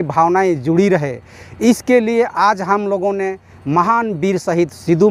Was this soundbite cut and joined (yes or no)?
no